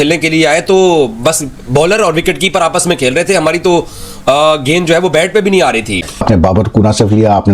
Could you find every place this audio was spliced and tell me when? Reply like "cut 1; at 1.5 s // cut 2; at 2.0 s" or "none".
cut 1; at 6.2 s